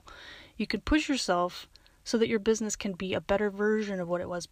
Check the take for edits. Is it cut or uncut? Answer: uncut